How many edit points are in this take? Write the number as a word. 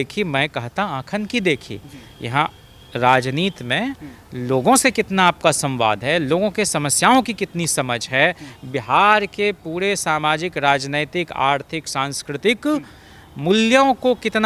zero